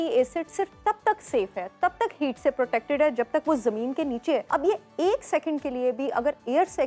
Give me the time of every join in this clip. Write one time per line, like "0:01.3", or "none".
0:04.4